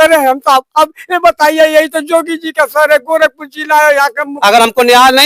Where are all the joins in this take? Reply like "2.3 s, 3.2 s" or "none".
4.3 s